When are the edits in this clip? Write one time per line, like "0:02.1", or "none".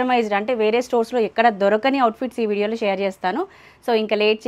none